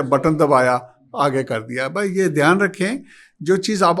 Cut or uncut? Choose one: uncut